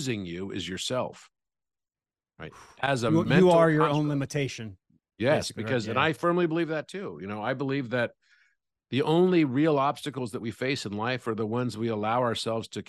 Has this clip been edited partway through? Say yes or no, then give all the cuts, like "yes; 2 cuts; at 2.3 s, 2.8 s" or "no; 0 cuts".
no; 0 cuts